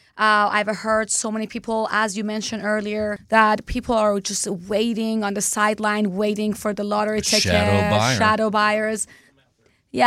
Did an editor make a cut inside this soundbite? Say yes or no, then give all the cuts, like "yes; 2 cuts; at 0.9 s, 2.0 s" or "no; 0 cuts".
yes; 1 cut; at 3.2 s